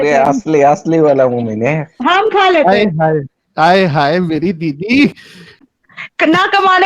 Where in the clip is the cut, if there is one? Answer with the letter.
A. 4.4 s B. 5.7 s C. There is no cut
B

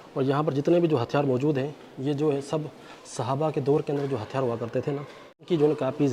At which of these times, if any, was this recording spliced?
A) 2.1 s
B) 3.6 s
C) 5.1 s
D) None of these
D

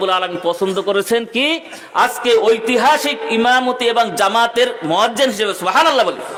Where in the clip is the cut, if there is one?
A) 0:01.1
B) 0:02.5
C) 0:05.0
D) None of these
D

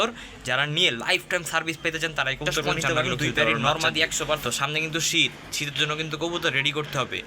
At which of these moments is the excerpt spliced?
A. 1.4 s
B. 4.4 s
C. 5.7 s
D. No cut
B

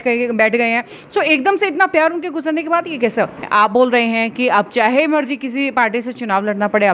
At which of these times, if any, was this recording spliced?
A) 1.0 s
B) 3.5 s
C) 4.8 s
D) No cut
B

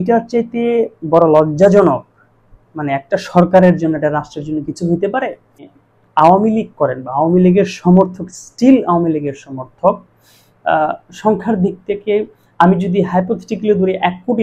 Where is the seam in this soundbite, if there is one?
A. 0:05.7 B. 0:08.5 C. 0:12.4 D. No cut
A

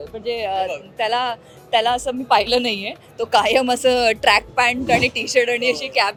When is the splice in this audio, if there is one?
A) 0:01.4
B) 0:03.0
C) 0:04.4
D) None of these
D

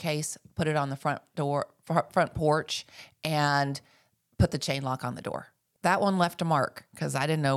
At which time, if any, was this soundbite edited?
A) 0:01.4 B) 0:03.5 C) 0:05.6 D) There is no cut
C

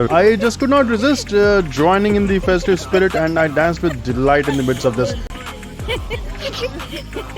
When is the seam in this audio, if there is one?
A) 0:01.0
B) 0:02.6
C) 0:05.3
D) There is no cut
C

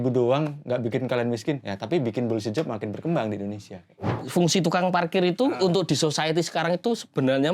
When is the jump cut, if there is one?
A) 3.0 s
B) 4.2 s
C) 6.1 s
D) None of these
B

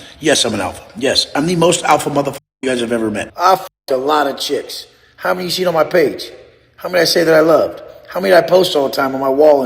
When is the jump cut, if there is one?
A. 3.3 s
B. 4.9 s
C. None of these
A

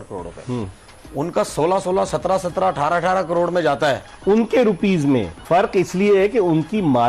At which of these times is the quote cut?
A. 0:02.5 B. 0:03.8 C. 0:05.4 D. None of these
C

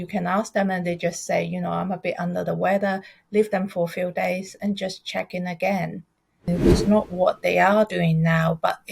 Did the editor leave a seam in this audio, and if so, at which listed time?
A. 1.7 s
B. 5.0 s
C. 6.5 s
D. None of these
C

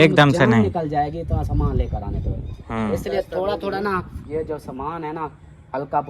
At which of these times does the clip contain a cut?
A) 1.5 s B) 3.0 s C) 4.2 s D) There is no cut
C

